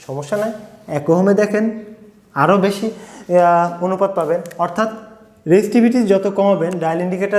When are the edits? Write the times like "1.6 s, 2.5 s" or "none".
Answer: none

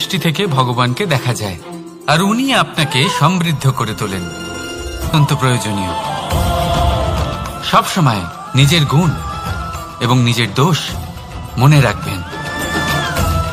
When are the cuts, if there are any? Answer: 5.1 s

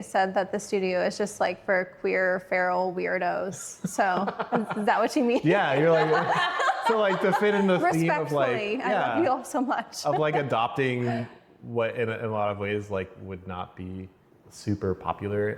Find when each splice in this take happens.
none

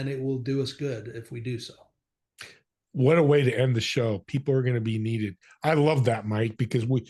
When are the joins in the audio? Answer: none

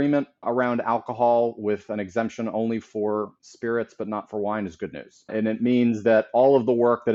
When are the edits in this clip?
none

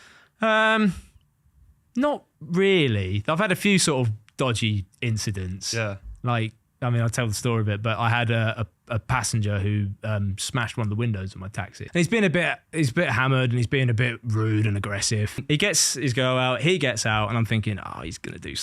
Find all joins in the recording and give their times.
11.8 s, 15.4 s

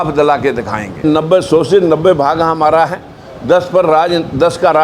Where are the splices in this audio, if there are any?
1.0 s

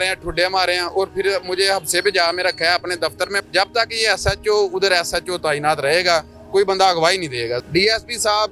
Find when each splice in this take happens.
3.4 s, 7.6 s

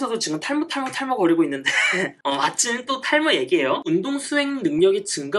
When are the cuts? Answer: 2.1 s, 3.8 s

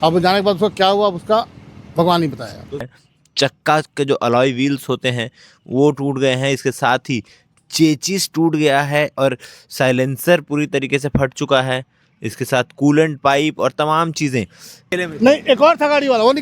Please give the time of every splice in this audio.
2.8 s, 14.9 s

